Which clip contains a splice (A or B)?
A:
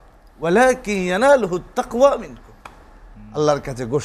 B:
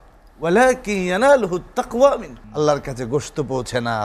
B